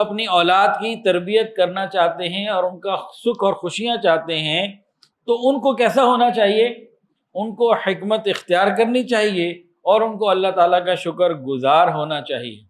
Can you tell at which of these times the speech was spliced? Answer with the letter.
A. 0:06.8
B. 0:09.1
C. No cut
C